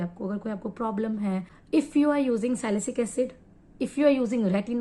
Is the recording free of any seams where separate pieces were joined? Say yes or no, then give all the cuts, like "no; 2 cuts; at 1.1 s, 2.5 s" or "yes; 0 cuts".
no; 1 cut; at 1.5 s